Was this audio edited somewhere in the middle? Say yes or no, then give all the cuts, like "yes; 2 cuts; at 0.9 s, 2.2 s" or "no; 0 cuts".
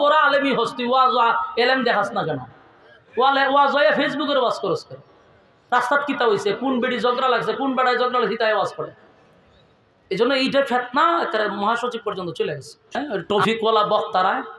yes; 1 cut; at 13.0 s